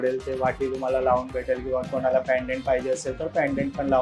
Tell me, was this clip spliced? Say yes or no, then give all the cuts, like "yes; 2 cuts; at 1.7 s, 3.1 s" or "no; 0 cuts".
no; 0 cuts